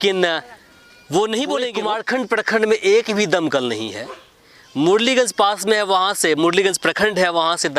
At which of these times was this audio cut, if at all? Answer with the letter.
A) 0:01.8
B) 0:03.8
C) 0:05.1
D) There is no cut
A